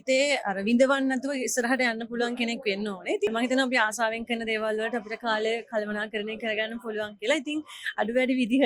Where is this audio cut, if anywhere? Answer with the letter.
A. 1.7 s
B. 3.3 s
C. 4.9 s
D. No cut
B